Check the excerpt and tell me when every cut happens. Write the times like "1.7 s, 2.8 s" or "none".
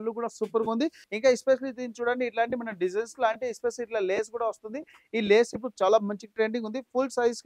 1.1 s